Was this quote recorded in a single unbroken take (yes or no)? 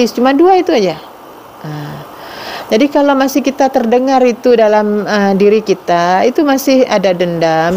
yes